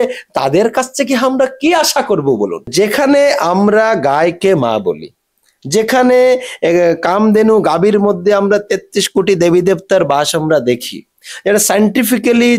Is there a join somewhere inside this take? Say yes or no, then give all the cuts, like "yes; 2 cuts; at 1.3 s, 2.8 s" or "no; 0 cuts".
yes; 1 cut; at 2.7 s